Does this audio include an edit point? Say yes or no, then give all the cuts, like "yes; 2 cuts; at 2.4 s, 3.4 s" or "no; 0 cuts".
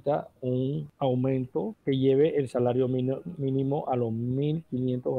yes; 2 cuts; at 0.9 s, 1.7 s